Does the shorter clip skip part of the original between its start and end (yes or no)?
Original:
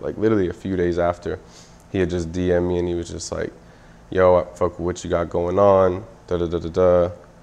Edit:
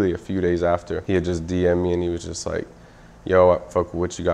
yes